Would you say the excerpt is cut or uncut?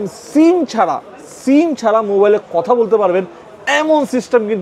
uncut